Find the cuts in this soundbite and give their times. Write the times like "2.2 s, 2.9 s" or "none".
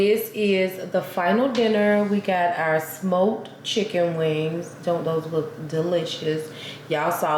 none